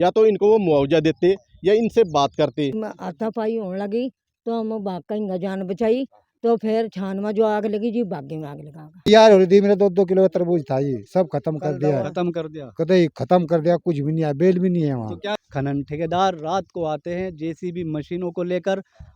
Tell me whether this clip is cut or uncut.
cut